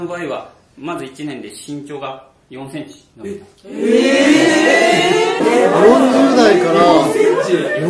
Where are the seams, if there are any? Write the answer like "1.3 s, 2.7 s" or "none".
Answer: 5.4 s